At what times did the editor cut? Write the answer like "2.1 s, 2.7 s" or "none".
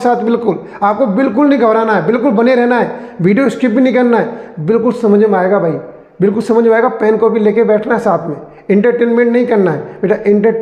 none